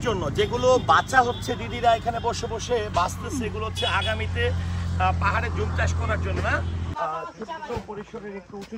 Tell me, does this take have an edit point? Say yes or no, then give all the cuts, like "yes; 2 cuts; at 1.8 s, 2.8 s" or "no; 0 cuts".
yes; 1 cut; at 6.9 s